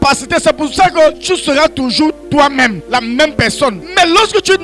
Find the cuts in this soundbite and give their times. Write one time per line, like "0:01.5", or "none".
0:01.2
0:02.8
0:03.8